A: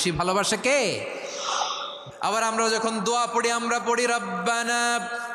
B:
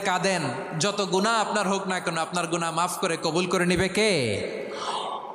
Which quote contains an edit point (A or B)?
A